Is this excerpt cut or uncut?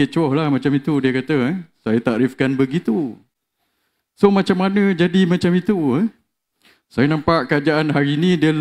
uncut